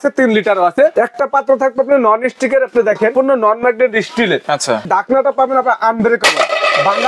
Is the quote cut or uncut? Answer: cut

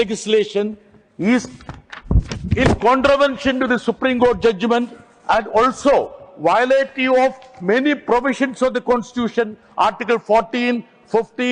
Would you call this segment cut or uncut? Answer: uncut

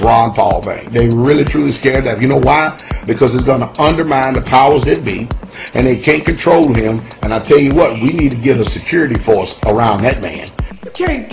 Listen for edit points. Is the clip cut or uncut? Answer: cut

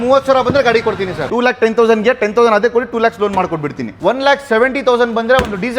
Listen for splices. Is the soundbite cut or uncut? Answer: cut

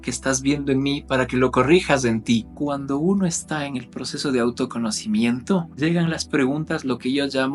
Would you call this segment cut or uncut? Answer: cut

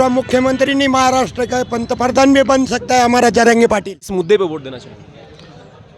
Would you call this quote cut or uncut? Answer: cut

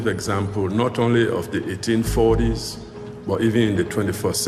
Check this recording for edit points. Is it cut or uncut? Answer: uncut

